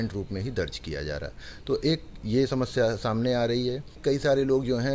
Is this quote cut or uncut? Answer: cut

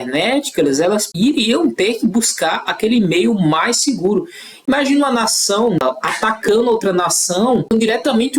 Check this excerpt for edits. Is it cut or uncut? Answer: cut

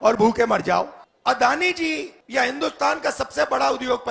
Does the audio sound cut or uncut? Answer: cut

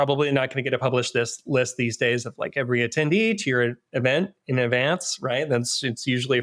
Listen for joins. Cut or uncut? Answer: uncut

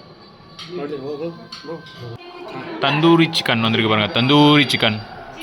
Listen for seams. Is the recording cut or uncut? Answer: cut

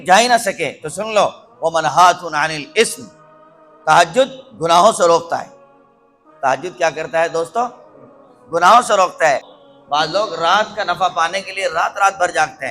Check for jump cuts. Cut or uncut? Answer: cut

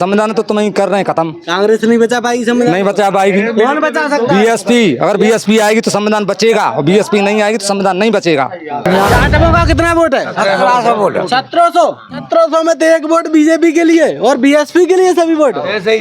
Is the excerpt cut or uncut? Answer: cut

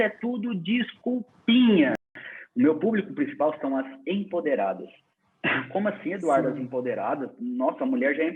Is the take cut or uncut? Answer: cut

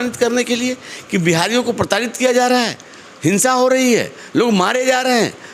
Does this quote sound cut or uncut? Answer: uncut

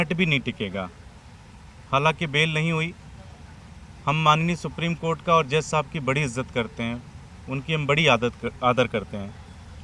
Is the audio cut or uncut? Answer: uncut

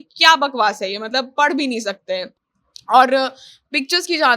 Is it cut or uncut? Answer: uncut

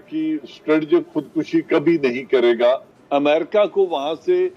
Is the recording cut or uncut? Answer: uncut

